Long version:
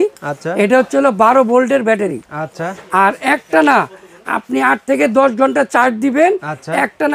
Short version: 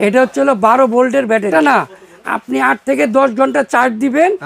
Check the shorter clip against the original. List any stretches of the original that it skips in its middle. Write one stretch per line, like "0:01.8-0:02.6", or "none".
0:02.1-0:03.5